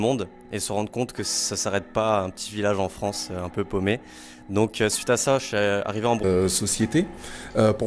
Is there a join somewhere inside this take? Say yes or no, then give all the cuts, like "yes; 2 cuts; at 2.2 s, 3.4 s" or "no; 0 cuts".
yes; 1 cut; at 6.2 s